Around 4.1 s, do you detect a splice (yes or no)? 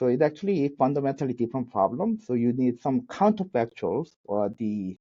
no